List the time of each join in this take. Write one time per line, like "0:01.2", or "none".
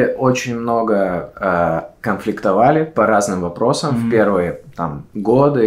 none